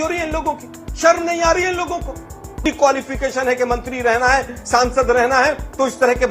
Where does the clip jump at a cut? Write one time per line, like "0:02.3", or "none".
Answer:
0:02.6